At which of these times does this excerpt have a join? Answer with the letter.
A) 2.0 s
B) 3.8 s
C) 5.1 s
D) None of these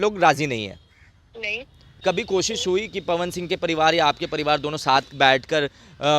A